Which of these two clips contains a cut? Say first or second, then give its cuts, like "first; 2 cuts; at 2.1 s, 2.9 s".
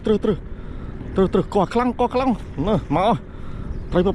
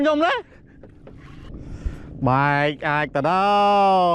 second; 1 cut; at 1.4 s